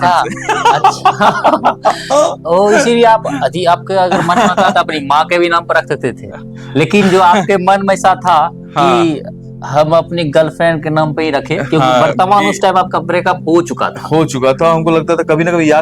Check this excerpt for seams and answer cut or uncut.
uncut